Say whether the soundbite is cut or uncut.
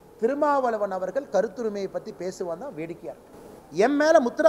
cut